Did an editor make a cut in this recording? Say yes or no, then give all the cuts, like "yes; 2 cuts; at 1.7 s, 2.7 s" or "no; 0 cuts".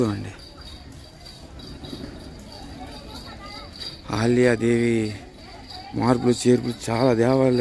no; 0 cuts